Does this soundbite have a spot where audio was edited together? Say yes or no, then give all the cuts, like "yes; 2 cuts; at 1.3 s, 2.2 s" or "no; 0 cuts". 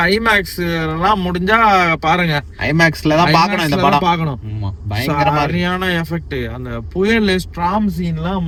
no; 0 cuts